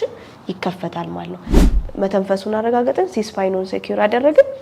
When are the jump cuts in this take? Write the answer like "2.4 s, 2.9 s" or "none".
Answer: 1.7 s